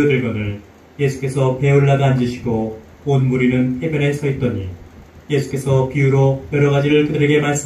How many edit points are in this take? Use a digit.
0